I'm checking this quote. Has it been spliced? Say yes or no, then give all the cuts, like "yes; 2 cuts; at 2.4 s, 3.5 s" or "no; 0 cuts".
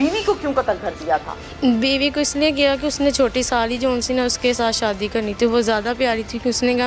no; 0 cuts